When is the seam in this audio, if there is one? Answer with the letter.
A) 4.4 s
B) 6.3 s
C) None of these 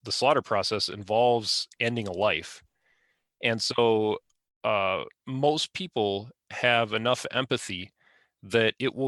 C